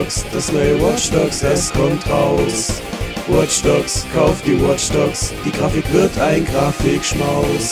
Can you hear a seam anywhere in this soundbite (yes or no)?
no